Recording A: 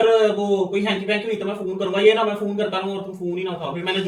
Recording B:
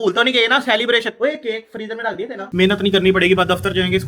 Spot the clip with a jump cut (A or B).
B